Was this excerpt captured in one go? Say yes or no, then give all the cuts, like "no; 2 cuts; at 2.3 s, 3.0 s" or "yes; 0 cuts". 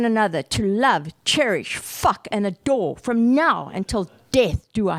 yes; 0 cuts